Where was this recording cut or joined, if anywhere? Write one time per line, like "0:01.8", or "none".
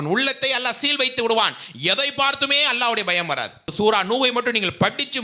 0:03.7

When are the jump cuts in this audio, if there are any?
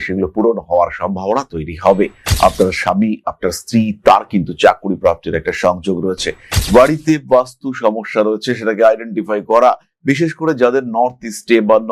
0:06.5

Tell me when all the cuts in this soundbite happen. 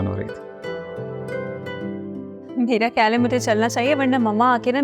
0:01.7

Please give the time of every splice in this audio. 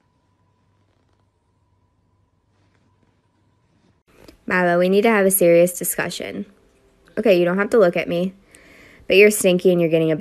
none

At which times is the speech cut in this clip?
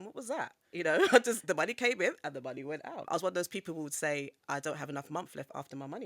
0:03.0

